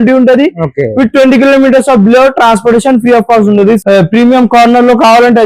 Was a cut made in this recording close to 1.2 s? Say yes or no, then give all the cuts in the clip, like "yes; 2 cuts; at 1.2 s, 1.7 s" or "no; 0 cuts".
no; 1 cut; at 3.8 s